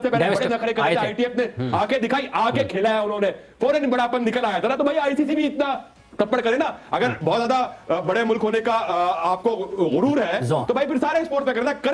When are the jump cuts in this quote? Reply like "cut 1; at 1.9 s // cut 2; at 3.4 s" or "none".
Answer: none